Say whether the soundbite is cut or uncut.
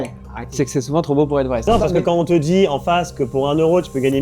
cut